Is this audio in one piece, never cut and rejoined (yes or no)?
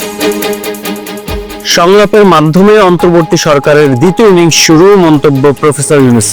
no